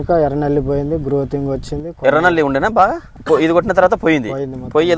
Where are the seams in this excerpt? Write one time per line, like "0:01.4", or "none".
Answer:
0:03.1